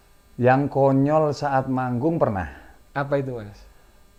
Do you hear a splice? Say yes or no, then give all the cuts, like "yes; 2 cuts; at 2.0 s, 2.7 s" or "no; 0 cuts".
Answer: no; 0 cuts